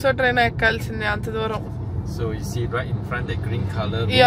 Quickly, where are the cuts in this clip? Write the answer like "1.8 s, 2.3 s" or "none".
none